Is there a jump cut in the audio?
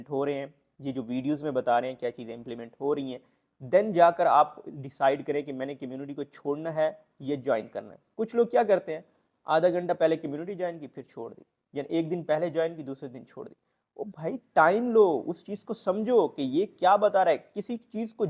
no; 0 cuts

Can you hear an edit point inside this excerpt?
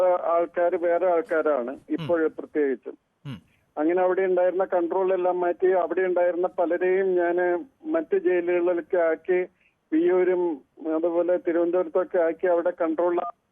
no; 0 cuts

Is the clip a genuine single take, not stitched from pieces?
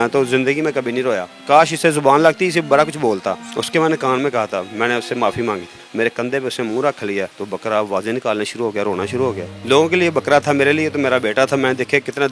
no; 4 cuts; at 1.3 s, 3.5 s, 5.8 s, 9.5 s

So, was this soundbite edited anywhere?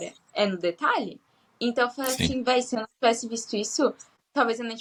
no; 0 cuts

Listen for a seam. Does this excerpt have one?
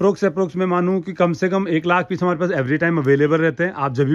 no; 0 cuts

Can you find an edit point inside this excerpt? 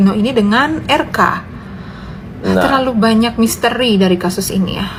no; 0 cuts

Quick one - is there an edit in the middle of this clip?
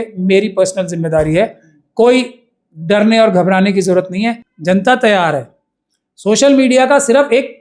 yes; 1 cut; at 4.5 s

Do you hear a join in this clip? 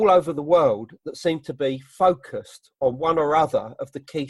no; 0 cuts

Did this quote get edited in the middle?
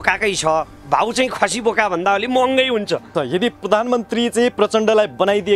yes; 1 cut; at 3.1 s

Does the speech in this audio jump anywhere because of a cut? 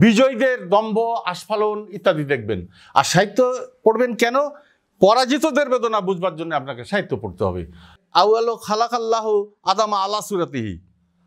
yes; 1 cut; at 7.9 s

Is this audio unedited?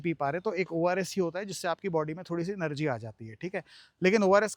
yes; 0 cuts

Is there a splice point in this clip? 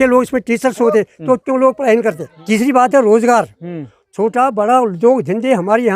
yes; 1 cut; at 2.3 s

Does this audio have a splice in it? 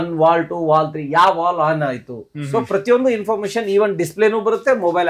no; 0 cuts

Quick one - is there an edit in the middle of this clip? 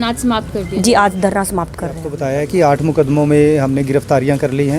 yes; 1 cut; at 2.1 s

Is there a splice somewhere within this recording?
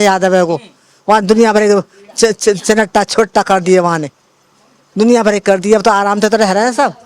no; 0 cuts

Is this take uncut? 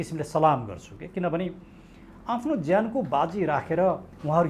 yes; 0 cuts

